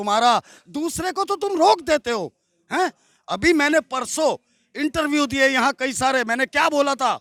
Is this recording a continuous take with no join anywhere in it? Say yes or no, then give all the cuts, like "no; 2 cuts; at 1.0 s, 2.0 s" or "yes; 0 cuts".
yes; 0 cuts